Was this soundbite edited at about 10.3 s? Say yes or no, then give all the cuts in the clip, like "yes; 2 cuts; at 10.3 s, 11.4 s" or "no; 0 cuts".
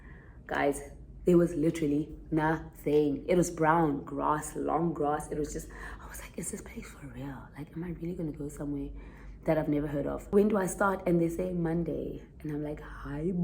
yes; 1 cut; at 10.3 s